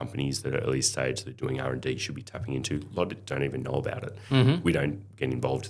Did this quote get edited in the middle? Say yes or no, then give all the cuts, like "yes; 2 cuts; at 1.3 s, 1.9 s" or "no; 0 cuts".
no; 0 cuts